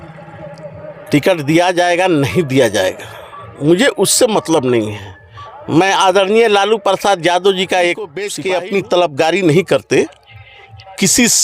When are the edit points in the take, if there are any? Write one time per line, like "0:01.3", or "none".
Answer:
0:08.3